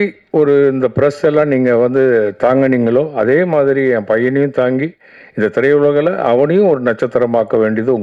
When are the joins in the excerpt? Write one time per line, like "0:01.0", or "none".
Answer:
none